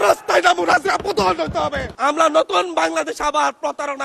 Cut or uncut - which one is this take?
cut